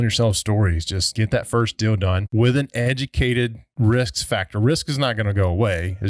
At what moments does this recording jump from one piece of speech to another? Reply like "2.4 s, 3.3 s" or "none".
1.0 s, 2.2 s, 3.7 s